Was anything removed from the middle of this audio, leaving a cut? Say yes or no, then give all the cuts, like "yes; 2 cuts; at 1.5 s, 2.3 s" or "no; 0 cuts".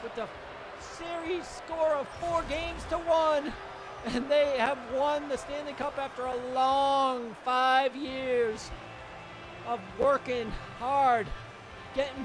no; 0 cuts